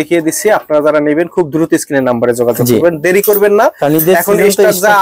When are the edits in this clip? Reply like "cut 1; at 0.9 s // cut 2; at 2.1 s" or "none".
none